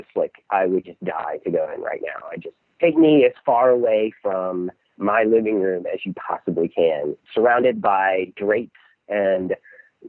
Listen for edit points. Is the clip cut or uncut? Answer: cut